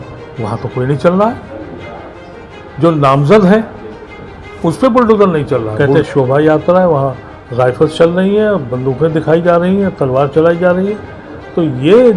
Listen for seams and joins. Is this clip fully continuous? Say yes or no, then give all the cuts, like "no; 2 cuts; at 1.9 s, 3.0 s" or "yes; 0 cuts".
no; 1 cut; at 5.8 s